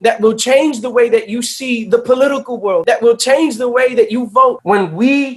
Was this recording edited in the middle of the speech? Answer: yes; 2 cuts; at 2.8 s, 4.6 s

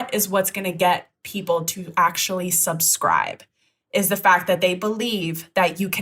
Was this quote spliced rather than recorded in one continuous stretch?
no; 0 cuts

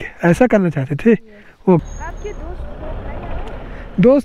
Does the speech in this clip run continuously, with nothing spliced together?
no; 1 cut; at 1.8 s

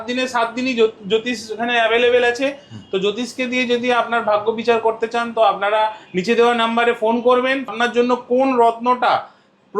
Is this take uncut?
no; 1 cut; at 7.7 s

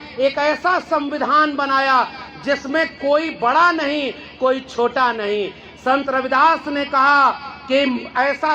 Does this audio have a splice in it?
no; 0 cuts

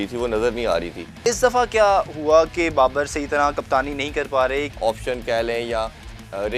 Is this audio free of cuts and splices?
no; 2 cuts; at 1.3 s, 4.7 s

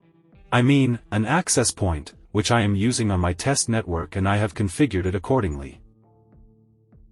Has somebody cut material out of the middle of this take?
yes; 1 cut; at 5.8 s

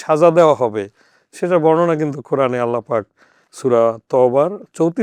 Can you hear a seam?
no; 0 cuts

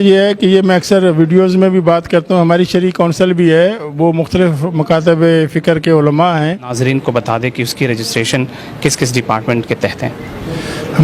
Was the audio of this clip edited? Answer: yes; 1 cut; at 6.7 s

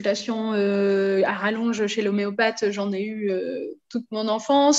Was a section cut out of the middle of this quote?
no; 0 cuts

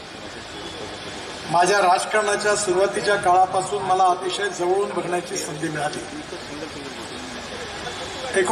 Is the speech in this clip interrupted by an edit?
no; 0 cuts

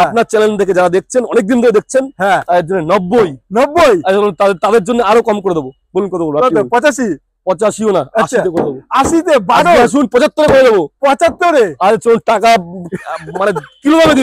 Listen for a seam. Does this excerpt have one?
no; 0 cuts

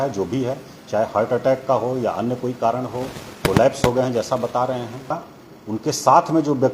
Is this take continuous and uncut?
no; 1 cut; at 5.2 s

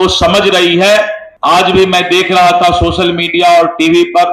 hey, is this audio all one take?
no; 1 cut; at 1.2 s

